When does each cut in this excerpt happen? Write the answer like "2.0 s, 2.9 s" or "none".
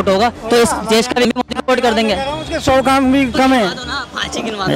1.3 s

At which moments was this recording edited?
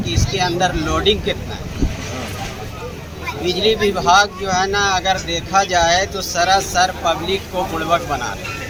none

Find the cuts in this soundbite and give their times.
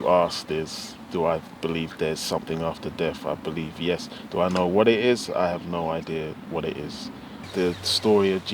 7.5 s

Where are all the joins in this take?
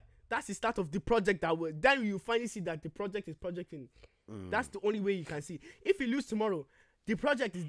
none

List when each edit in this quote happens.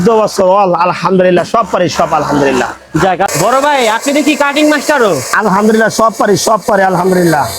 3.3 s

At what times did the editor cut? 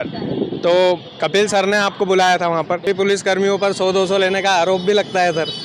2.8 s

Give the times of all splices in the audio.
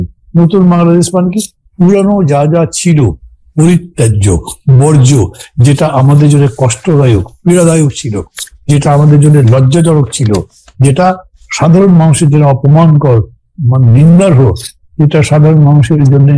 none

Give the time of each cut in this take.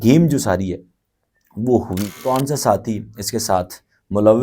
2.2 s

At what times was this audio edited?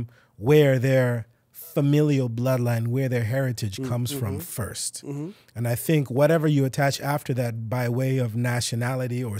none

